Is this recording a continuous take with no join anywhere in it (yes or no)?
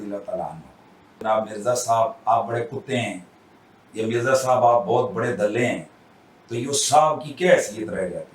no